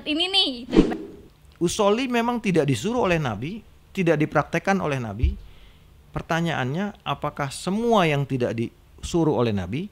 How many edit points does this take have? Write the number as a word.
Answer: one